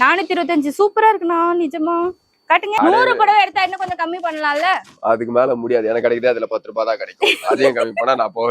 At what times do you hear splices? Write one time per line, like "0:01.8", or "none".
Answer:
0:02.8